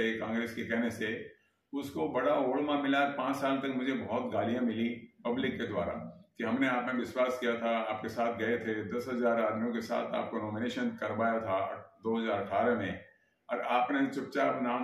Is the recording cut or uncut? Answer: uncut